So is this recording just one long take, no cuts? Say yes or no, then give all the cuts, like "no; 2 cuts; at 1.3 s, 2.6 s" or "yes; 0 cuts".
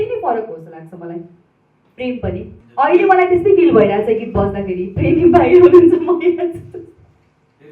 no; 1 cut; at 2.6 s